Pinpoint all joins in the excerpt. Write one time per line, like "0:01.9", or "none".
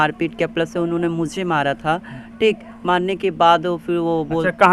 none